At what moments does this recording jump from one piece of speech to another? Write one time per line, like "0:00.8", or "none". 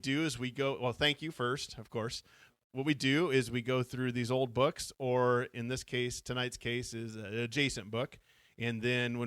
0:02.5